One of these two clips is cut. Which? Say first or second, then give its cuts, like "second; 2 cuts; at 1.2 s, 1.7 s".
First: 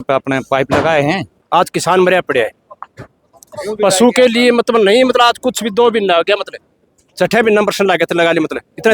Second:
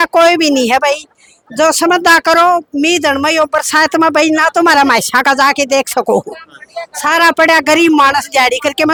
first; 1 cut; at 1.3 s